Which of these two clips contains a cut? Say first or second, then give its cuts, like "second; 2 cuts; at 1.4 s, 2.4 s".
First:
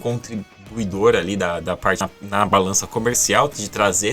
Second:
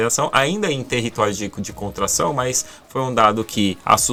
first; 1 cut; at 2.1 s